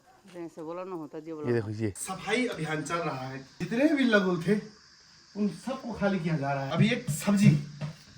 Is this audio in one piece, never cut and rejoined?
no; 3 cuts; at 2.1 s, 3.6 s, 6.7 s

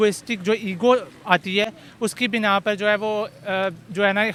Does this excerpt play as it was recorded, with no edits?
yes; 0 cuts

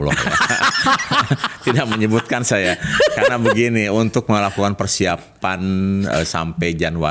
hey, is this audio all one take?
yes; 0 cuts

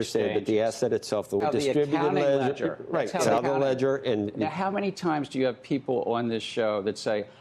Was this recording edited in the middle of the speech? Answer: yes; 2 cuts; at 1.4 s, 3.3 s

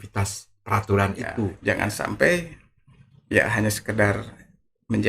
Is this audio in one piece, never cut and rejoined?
no; 1 cut; at 1.6 s

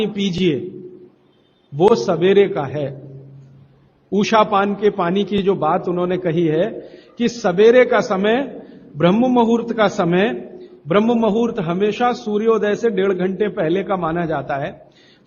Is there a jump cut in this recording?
no; 0 cuts

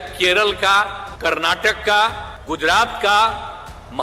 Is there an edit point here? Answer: yes; 2 cuts; at 1.0 s, 2.3 s

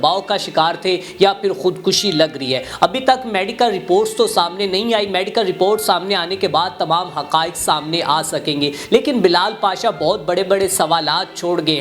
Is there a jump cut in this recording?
no; 0 cuts

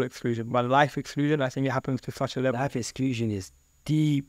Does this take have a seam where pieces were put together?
no; 0 cuts

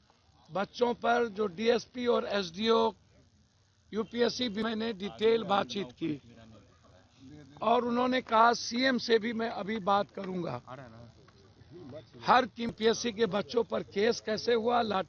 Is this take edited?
yes; 2 cuts; at 4.7 s, 12.7 s

